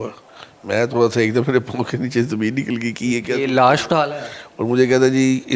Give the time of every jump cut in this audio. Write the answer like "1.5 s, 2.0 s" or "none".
none